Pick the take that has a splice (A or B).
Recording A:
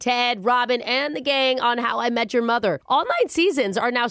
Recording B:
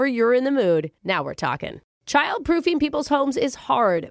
B